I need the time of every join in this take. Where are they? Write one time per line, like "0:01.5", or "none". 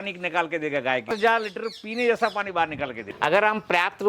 0:01.0
0:03.0